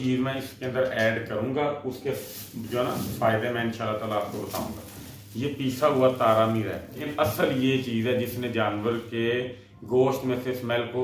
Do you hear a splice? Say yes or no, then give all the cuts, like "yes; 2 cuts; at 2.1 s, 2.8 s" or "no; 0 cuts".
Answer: yes; 1 cut; at 7.1 s